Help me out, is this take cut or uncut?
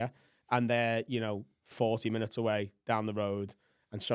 uncut